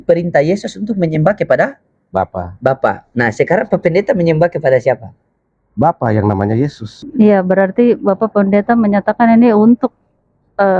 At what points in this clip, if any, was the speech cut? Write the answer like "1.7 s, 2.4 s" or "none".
6.9 s